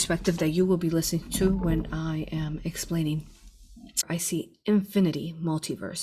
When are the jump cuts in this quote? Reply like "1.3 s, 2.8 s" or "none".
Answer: 4.1 s